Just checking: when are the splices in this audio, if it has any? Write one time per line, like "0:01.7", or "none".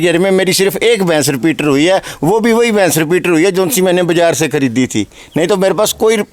none